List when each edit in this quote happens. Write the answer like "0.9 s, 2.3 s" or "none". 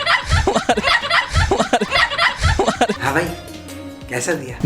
3.0 s